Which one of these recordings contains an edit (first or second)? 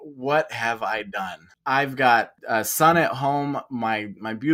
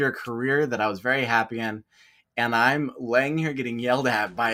first